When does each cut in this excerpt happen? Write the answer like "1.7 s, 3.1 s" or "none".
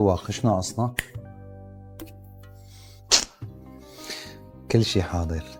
none